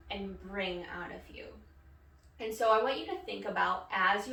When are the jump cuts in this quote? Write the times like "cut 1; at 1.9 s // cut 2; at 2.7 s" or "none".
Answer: none